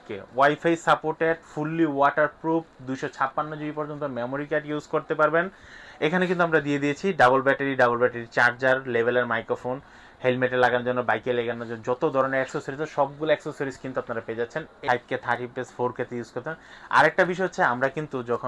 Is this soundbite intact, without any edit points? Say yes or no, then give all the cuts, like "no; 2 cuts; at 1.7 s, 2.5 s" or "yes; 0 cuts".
no; 1 cut; at 14.8 s